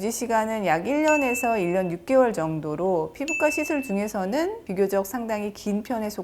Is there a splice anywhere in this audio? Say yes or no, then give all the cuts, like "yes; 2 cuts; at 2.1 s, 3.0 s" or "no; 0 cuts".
no; 0 cuts